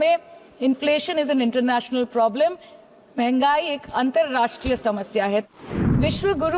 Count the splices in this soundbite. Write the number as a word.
one